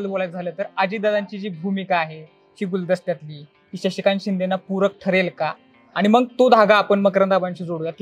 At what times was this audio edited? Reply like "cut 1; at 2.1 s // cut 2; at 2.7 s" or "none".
none